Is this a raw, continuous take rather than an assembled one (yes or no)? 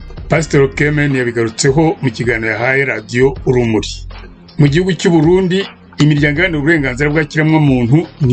yes